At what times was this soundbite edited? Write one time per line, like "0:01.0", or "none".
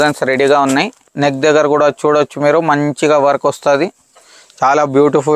0:01.1